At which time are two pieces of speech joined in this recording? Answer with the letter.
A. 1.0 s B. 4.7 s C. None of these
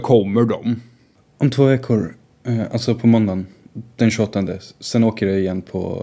A